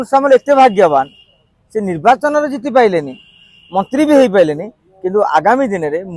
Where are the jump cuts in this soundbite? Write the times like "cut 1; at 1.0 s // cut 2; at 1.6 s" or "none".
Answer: none